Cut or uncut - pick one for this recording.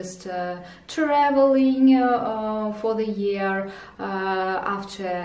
uncut